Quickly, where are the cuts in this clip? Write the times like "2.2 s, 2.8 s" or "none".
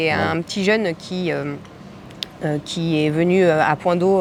none